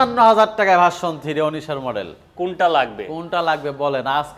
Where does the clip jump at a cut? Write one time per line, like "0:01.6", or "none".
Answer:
none